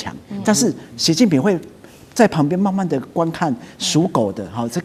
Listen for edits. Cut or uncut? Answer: uncut